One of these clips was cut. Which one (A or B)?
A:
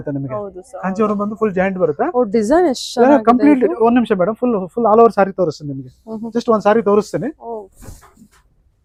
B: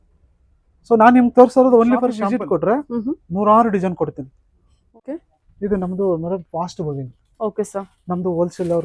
B